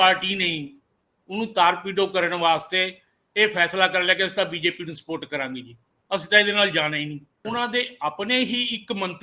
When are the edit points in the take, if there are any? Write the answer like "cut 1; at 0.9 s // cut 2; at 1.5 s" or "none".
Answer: cut 1; at 7.3 s